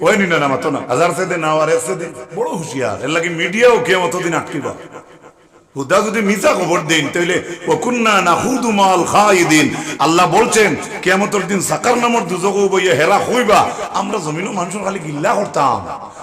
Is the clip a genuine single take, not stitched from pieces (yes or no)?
no